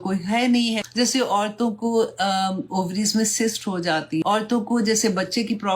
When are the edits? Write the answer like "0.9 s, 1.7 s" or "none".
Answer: 0.9 s, 4.2 s